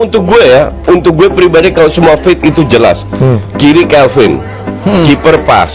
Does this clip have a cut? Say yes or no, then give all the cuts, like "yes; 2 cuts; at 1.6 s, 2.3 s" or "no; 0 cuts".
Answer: no; 0 cuts